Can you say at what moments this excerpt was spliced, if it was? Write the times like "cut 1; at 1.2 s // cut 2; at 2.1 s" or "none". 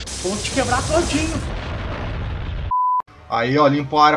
cut 1; at 3.1 s